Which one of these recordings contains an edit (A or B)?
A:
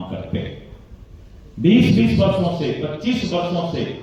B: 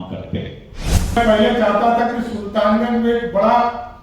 B